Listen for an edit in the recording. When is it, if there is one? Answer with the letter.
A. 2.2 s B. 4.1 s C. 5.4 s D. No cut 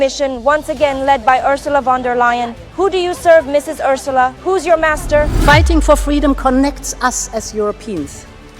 C